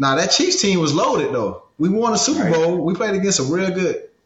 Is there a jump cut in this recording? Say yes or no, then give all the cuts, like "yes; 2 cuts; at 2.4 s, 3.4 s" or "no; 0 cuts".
no; 0 cuts